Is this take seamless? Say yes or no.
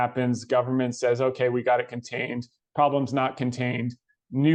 yes